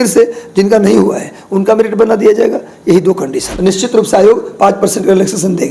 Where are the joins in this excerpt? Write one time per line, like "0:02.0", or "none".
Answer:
0:03.5